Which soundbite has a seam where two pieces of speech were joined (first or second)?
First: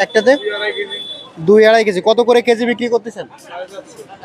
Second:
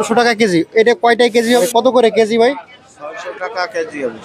second